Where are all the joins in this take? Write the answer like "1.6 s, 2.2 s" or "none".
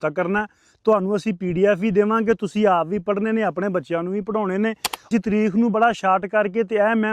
5.1 s

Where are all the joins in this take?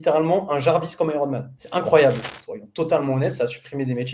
2.3 s

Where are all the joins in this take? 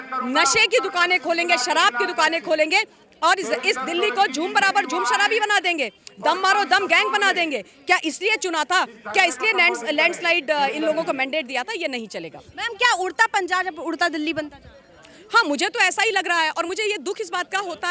none

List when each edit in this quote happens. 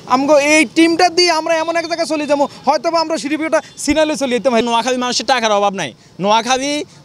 4.6 s

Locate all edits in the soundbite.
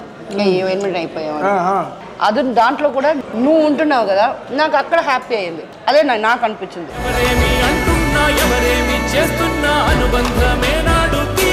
2.0 s, 3.2 s, 5.7 s

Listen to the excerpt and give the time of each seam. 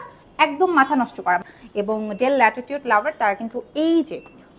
1.5 s

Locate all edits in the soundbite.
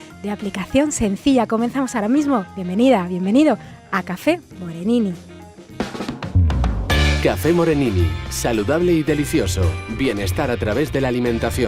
6.8 s

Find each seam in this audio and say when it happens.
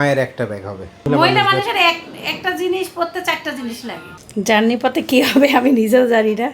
1.1 s, 4.1 s

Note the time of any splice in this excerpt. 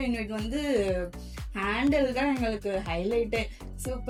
none

